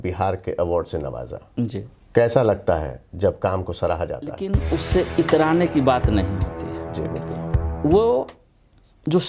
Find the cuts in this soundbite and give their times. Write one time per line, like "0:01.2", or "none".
0:01.9
0:04.6

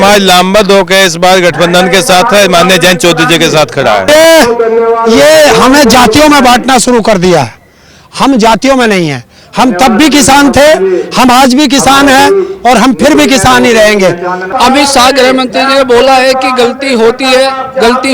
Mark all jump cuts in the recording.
0:04.1
0:14.4

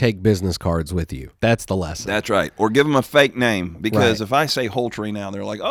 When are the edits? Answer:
none

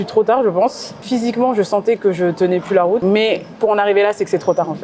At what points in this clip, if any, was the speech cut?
0:01.0
0:03.0

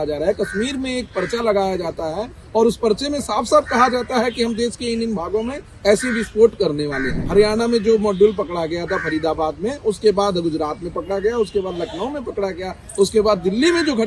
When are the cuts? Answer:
0:07.2

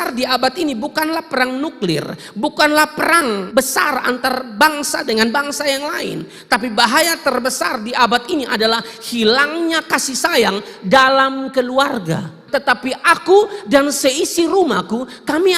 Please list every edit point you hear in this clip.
0:03.5
0:12.4

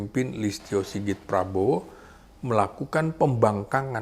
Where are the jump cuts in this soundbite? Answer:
none

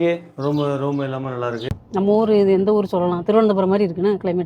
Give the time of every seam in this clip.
0:01.7

